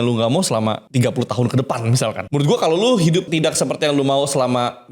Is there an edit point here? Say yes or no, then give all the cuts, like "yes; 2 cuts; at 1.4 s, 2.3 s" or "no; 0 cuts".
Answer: yes; 3 cuts; at 0.8 s, 2.2 s, 3.3 s